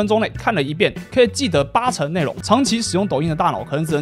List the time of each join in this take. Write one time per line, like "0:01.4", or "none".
0:02.3